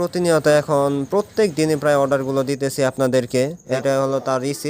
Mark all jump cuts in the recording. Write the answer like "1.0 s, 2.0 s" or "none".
3.8 s